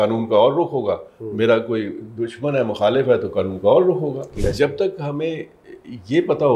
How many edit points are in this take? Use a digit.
1